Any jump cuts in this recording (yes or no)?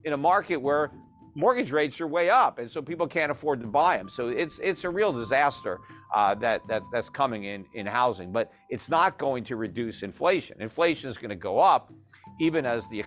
no